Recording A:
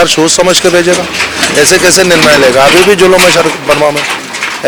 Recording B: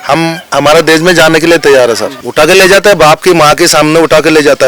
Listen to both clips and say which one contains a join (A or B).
B